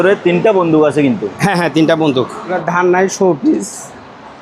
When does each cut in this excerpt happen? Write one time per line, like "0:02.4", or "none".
0:02.6

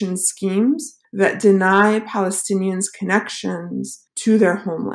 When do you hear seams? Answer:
0:04.0

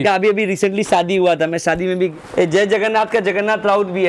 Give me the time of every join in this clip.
0:02.1

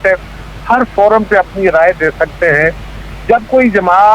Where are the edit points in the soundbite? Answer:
none

